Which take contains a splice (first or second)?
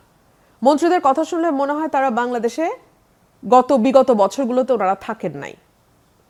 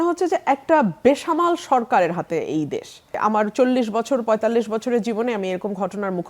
second